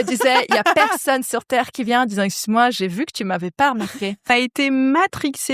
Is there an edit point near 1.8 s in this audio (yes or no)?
no